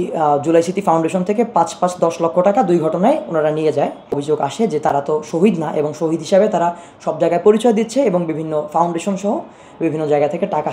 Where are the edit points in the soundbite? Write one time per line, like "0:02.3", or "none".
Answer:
0:04.2